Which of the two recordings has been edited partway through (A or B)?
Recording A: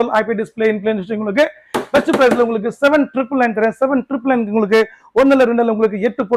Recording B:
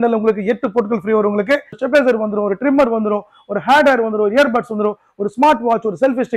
B